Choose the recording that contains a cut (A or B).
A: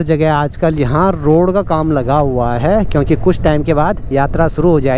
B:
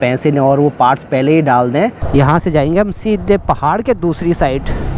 B